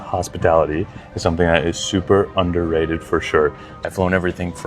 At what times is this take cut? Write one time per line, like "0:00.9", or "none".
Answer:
0:03.7